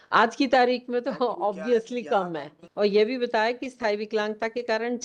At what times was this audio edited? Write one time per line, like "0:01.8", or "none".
0:02.7